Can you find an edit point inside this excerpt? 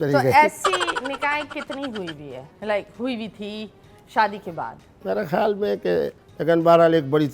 yes; 1 cut; at 6.2 s

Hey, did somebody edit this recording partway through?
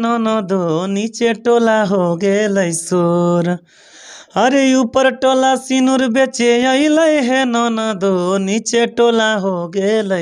no; 0 cuts

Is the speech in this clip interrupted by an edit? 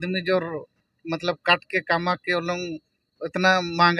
no; 0 cuts

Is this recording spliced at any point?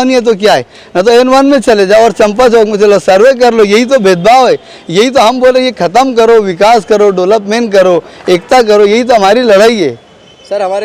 no; 0 cuts

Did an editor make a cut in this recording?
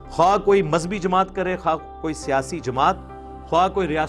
no; 0 cuts

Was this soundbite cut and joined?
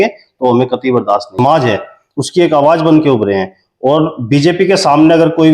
yes; 1 cut; at 1.3 s

